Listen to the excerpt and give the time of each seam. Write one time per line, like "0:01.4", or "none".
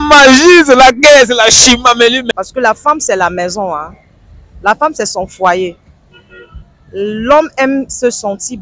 0:02.3